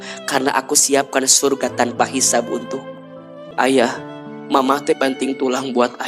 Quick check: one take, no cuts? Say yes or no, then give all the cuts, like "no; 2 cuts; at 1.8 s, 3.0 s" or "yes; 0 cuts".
no; 1 cut; at 3.5 s